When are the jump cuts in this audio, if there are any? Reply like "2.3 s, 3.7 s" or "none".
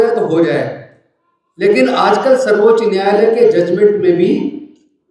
none

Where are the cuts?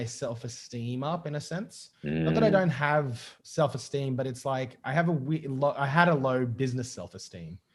none

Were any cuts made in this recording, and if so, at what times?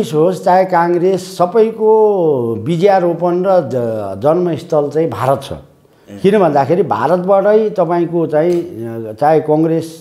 none

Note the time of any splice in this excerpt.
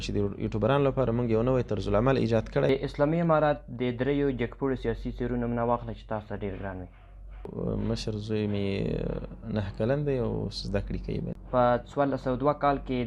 2.7 s, 7.5 s, 11.4 s

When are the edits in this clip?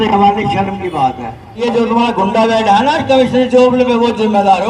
1.6 s

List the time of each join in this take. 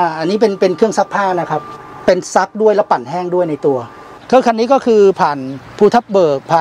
1.7 s, 4.2 s

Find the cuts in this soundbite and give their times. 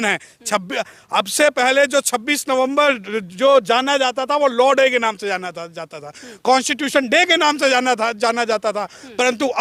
none

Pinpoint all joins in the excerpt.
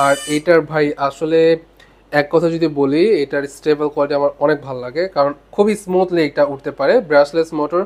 none

